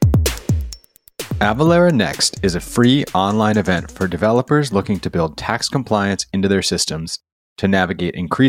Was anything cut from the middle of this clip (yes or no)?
yes